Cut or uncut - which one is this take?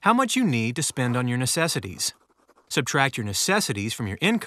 cut